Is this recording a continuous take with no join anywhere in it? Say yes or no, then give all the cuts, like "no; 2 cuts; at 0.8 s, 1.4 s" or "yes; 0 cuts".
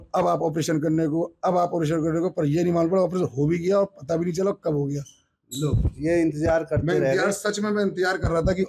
yes; 0 cuts